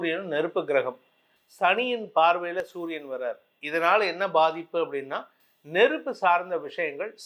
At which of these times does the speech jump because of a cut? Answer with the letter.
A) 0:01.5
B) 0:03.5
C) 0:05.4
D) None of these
D